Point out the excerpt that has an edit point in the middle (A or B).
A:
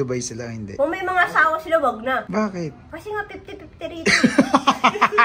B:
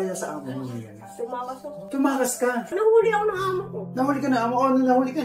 B